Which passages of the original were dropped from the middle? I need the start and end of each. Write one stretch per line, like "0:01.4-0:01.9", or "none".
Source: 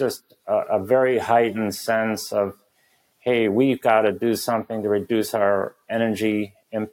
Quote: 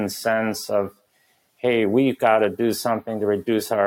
none